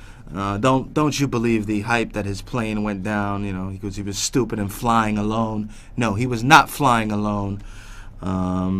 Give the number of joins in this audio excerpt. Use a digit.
1